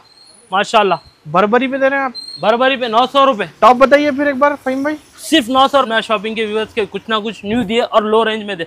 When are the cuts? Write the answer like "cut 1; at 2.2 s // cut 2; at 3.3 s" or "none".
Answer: cut 1; at 5.9 s